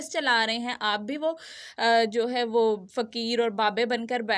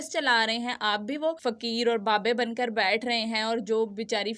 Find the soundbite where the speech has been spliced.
second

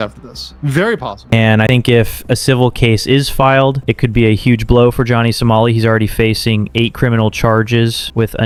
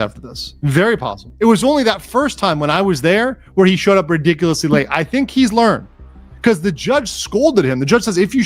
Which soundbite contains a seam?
second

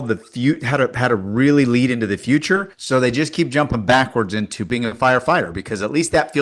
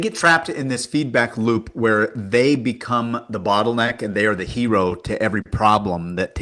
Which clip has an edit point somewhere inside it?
first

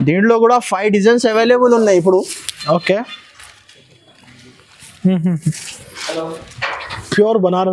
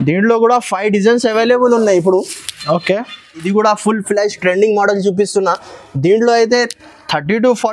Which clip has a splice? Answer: second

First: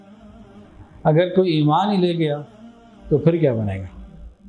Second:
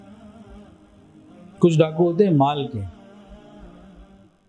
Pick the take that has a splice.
second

